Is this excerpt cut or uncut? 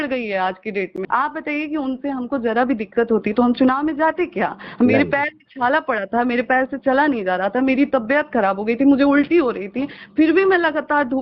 cut